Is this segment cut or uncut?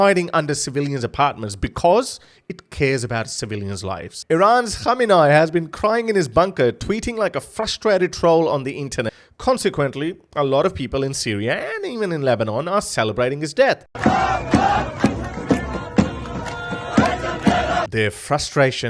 cut